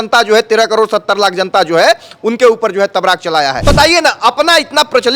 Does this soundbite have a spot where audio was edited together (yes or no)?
yes